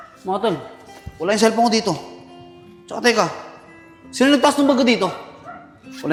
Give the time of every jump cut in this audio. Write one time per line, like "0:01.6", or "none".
none